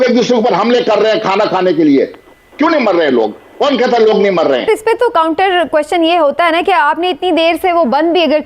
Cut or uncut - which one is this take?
cut